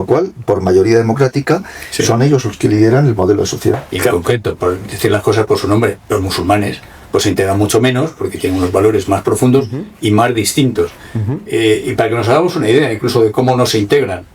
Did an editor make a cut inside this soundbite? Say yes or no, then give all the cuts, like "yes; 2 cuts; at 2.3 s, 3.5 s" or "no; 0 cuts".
yes; 1 cut; at 4.1 s